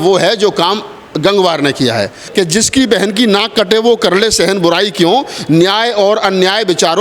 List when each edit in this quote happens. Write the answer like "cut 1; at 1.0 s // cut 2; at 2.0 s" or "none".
cut 1; at 2.2 s